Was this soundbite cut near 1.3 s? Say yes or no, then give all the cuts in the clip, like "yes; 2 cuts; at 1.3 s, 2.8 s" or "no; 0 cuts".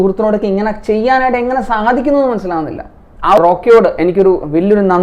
no; 1 cut; at 3.4 s